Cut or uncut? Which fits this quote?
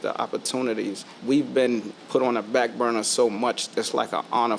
cut